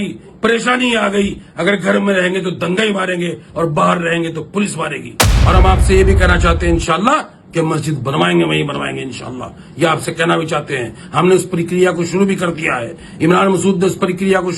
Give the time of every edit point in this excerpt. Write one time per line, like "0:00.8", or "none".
0:05.3